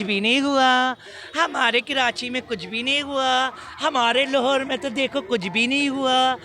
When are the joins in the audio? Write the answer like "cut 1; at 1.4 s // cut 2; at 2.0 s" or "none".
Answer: none